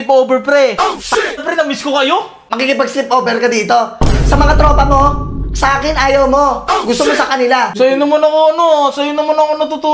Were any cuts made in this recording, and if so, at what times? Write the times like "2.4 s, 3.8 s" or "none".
2.4 s, 7.7 s